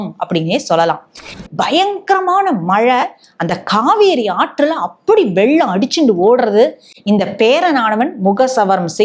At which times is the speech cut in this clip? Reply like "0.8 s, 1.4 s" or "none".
1.4 s